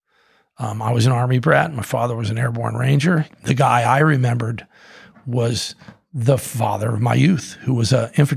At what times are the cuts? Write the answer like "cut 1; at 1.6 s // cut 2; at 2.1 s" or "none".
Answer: cut 1; at 3.3 s